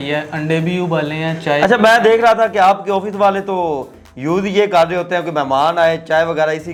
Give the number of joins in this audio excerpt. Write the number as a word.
zero